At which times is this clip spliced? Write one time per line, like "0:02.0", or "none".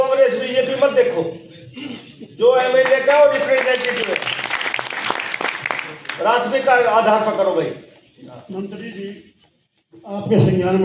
none